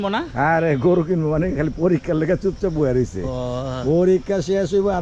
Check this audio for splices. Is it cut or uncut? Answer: uncut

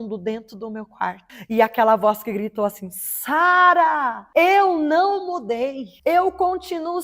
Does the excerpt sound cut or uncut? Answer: cut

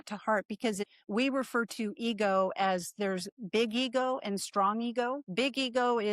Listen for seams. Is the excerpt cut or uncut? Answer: cut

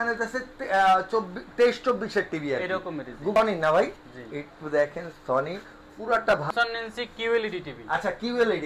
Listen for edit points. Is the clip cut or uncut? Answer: cut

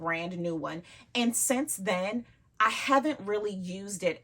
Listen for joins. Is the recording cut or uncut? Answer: uncut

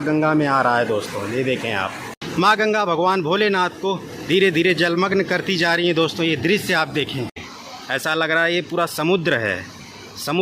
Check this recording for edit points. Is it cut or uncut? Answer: cut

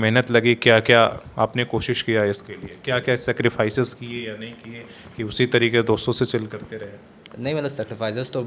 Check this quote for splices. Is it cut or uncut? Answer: uncut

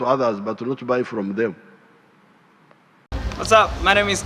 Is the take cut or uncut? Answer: cut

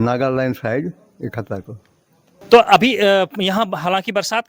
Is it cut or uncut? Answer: uncut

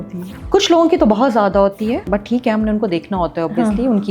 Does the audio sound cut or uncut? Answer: cut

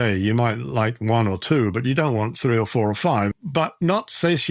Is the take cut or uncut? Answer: uncut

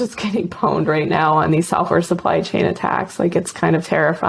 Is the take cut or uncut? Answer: uncut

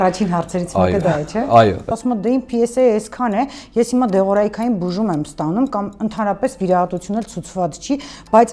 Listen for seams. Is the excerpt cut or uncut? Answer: cut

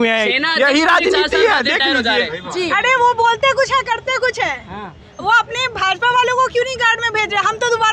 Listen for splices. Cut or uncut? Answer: cut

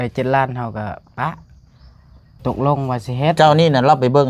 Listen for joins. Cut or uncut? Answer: cut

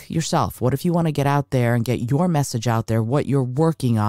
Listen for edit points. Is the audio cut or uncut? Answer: uncut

